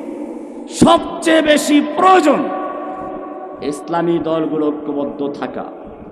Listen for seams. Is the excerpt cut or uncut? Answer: uncut